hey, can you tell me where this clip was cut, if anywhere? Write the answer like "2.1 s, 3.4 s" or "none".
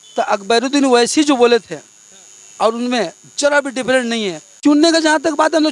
4.6 s